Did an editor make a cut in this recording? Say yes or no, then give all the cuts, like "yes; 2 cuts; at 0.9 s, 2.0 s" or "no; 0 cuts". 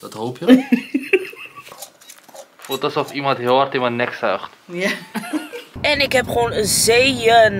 yes; 2 cuts; at 1.7 s, 5.6 s